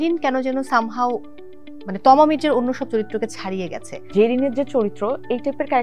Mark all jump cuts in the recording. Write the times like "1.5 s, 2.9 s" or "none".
4.0 s